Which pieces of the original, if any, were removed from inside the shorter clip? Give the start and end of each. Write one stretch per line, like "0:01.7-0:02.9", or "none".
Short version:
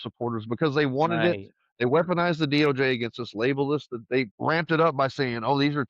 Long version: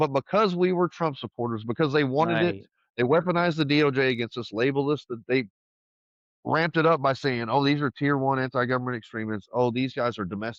0:05.5-0:06.4